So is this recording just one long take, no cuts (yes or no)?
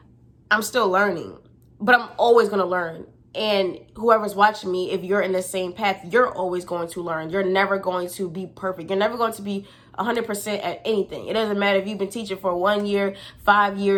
yes